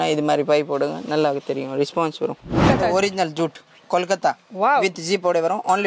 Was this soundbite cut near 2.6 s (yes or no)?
yes